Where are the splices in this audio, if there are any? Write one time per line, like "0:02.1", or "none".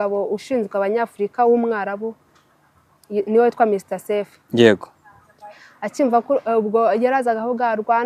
none